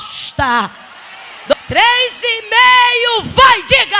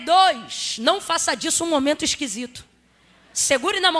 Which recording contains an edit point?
first; 1 cut; at 1.5 s

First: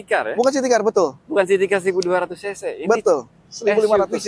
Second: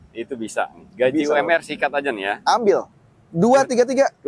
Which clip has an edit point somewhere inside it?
second; 1 cut; at 2.9 s

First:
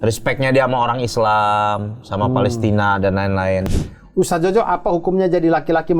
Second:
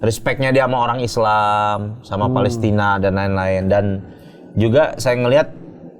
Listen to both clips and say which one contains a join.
first; 1 cut; at 3.7 s

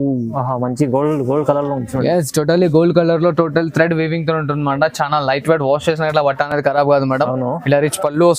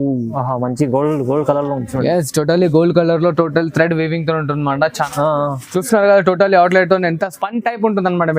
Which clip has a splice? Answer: second; 1 cut; at 5.1 s

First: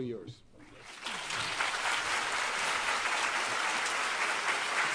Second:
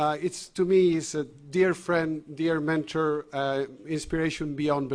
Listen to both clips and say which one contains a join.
second; 1 cut; at 1.1 s

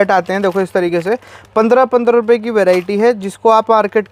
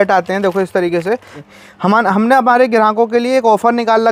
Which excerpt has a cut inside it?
second; 1 cut; at 1.4 s

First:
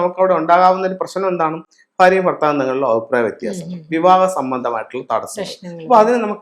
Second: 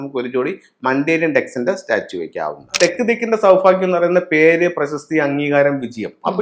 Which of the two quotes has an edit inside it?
second; 1 cut; at 2.8 s

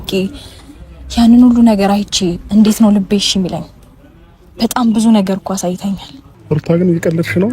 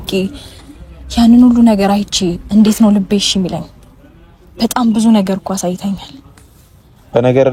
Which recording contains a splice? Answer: first; 1 cut; at 6.3 s

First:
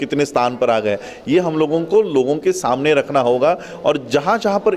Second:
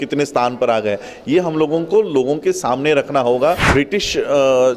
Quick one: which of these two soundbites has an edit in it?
second; 1 cut; at 3.7 s

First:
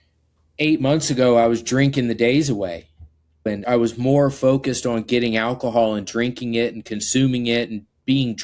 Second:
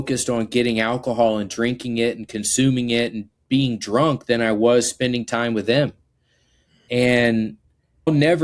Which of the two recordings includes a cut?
first; 1 cut; at 3.6 s

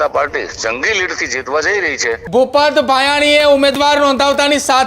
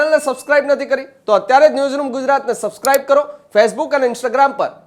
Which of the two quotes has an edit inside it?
first; 1 cut; at 2.1 s

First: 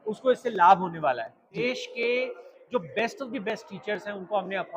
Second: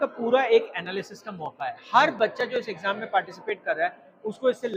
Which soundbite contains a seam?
first; 1 cut; at 1.6 s

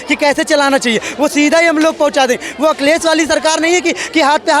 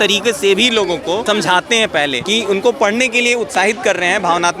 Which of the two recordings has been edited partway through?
second; 2 cuts; at 1.2 s, 2.2 s

